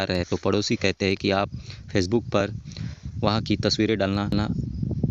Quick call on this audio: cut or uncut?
uncut